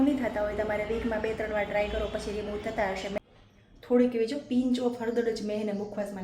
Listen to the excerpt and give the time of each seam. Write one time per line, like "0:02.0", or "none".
0:03.2